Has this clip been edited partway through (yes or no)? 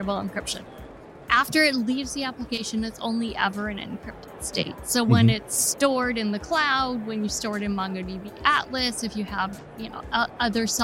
yes